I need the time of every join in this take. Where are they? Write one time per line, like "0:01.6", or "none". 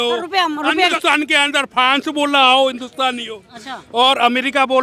0:01.0